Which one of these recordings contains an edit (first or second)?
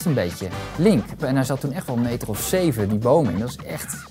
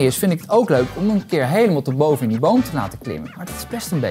first